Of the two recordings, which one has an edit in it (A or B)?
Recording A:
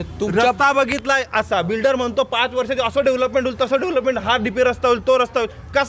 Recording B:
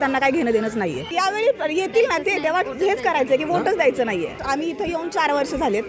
B